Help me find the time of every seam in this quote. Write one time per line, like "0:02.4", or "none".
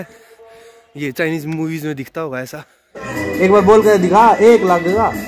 0:03.0